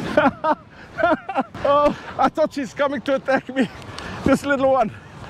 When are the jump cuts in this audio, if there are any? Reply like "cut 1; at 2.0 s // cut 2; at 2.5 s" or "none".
cut 1; at 1.5 s // cut 2; at 2.0 s